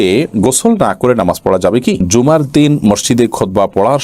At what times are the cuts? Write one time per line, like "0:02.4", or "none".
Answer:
0:02.1